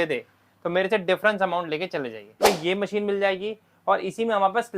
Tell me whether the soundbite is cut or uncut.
cut